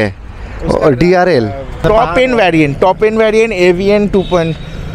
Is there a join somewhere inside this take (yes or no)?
yes